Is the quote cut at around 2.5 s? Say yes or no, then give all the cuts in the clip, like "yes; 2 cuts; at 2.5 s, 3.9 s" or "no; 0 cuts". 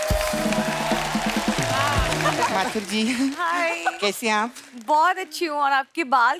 yes; 1 cut; at 2.5 s